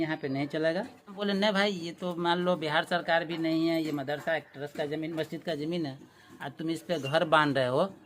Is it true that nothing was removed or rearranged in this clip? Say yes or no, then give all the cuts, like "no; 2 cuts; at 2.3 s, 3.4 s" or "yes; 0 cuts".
no; 1 cut; at 1.2 s